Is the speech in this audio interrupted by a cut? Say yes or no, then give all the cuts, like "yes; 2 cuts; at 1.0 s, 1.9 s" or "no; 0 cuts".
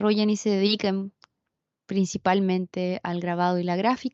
no; 0 cuts